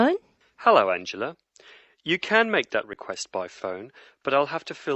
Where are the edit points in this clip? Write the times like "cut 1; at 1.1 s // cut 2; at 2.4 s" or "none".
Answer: cut 1; at 3.2 s